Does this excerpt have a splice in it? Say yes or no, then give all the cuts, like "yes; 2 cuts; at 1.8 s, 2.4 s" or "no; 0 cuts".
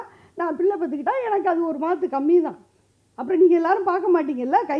no; 0 cuts